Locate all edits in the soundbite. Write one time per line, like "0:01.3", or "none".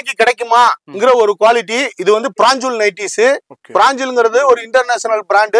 none